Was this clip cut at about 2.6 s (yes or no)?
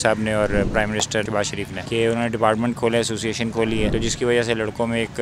no